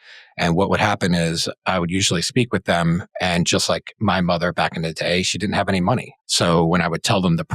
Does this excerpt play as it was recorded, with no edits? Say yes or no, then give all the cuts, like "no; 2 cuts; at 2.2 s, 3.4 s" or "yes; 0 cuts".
no; 1 cut; at 6.2 s